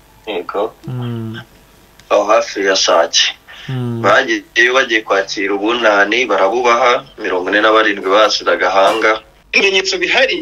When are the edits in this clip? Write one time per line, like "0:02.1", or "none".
0:09.4